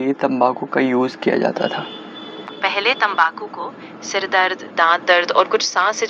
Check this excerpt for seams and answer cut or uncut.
uncut